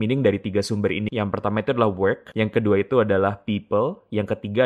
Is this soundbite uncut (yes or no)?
no